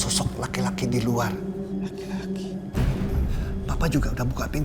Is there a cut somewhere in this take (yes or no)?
no